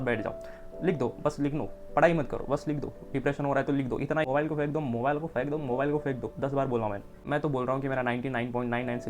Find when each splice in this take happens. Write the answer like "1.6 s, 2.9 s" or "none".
4.3 s, 7.2 s